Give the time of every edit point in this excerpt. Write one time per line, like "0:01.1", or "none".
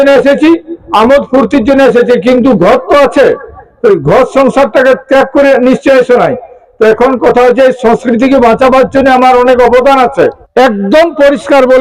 0:10.4